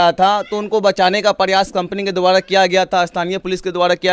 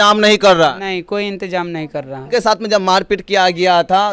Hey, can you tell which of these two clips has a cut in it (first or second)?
second